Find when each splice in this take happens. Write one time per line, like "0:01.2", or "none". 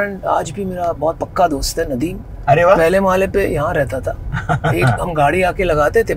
none